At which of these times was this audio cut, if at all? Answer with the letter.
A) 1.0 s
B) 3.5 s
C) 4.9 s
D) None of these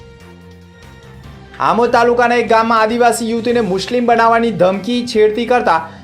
A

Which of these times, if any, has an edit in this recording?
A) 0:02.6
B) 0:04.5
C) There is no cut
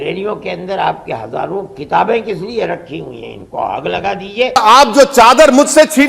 B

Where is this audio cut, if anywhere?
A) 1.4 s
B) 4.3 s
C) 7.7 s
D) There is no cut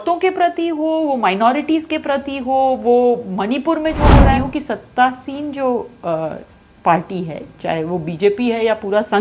B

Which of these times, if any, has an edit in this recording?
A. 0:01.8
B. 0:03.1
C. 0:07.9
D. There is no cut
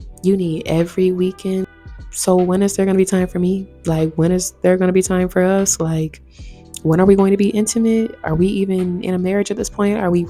A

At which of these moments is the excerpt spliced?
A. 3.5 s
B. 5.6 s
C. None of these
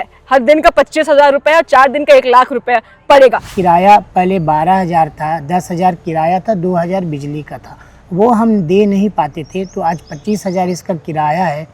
A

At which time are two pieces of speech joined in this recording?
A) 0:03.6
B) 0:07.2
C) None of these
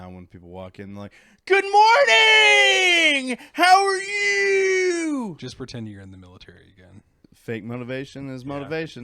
B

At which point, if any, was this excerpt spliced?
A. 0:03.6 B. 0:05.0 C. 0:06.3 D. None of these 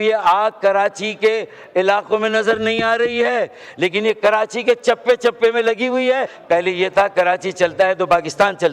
C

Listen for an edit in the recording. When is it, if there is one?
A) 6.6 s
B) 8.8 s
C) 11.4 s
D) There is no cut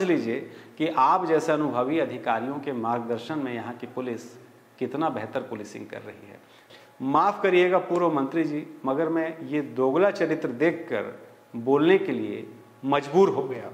A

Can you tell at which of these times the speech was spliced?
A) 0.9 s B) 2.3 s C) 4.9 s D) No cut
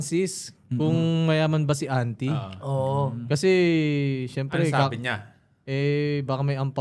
D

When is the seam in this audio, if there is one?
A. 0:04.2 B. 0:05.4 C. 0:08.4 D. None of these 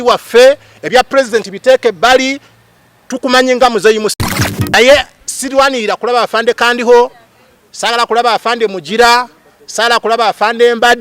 A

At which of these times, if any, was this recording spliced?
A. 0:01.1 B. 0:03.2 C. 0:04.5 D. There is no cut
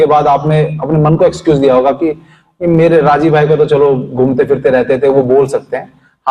D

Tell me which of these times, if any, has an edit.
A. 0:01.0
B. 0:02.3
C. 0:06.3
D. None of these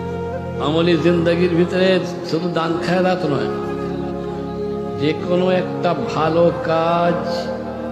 D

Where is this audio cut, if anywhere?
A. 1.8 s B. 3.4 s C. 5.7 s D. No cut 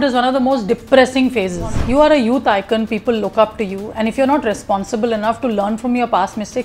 A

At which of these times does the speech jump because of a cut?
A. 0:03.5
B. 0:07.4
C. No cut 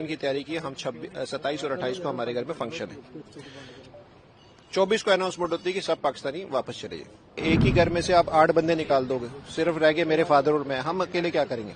B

